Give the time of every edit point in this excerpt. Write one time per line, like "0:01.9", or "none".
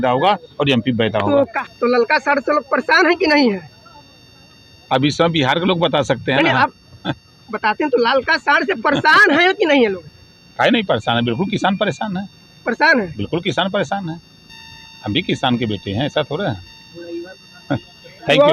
none